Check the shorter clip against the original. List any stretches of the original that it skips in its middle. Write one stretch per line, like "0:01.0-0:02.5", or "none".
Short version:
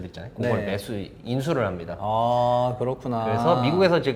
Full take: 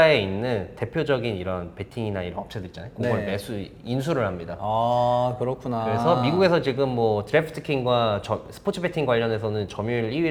none

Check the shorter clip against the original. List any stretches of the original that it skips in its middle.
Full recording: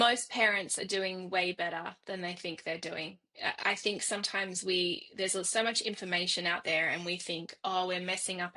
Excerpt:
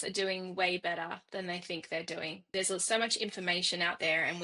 0:03.2-0:05.1

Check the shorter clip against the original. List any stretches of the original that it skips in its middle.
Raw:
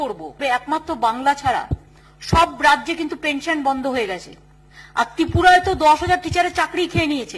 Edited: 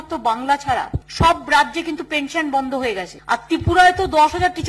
0:01.8-0:02.1
0:04.2-0:04.8

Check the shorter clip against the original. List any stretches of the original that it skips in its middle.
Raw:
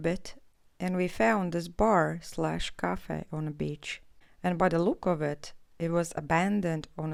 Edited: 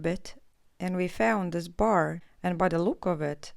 0:02.2-0:04.2

